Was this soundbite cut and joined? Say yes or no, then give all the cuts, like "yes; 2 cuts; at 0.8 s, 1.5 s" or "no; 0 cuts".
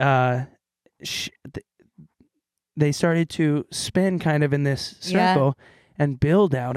no; 0 cuts